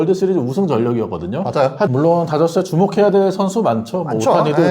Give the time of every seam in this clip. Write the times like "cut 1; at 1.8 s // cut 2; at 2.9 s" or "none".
cut 1; at 1.9 s